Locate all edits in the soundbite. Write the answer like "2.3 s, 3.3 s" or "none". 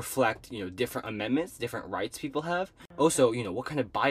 2.8 s